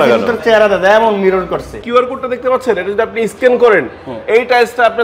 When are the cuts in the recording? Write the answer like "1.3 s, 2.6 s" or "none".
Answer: 1.8 s